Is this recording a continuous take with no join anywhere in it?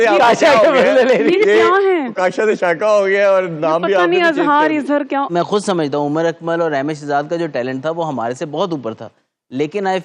no; 1 cut; at 5.3 s

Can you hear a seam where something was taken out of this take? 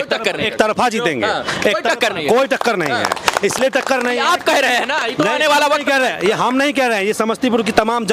no; 0 cuts

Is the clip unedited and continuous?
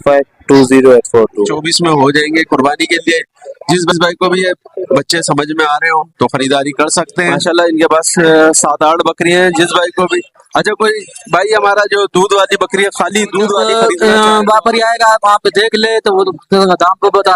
no; 3 cuts; at 1.7 s, 7.4 s, 13.7 s

